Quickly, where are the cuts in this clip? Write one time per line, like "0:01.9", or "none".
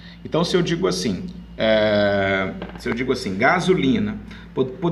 0:03.3